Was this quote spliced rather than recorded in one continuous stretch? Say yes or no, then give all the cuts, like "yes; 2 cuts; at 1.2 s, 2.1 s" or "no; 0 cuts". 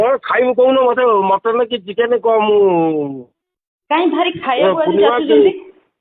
no; 0 cuts